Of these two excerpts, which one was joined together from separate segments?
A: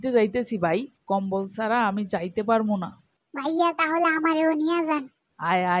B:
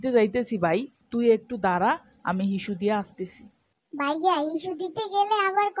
A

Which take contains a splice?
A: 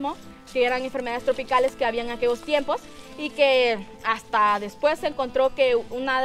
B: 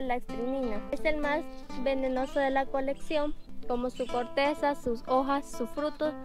B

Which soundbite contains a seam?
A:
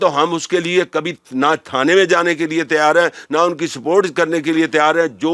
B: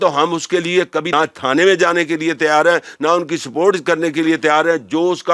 B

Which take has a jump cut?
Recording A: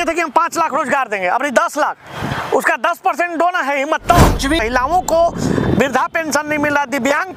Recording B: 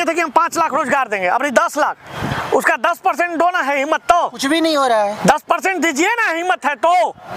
A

